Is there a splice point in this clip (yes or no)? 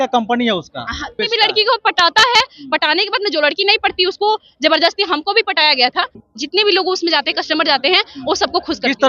yes